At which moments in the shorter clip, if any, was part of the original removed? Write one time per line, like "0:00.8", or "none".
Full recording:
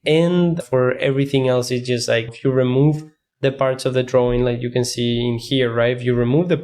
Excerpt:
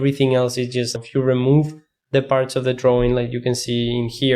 0:00.9